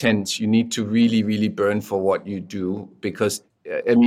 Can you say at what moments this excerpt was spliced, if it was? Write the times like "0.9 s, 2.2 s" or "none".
none